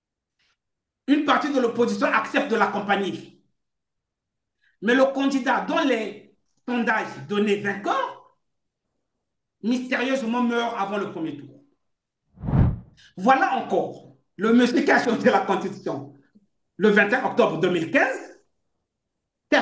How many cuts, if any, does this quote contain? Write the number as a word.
one